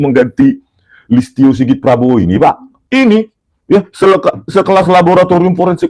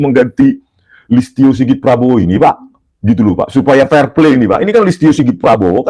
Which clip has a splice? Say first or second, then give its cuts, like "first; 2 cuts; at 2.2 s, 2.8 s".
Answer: first; 1 cut; at 2.7 s